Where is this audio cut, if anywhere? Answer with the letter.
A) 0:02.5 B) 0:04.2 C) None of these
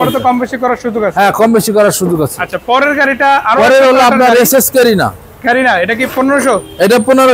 C